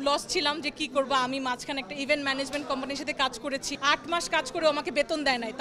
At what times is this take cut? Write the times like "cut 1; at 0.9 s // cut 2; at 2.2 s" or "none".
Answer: cut 1; at 3.7 s